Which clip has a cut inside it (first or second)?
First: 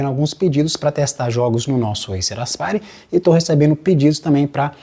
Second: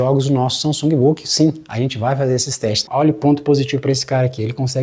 second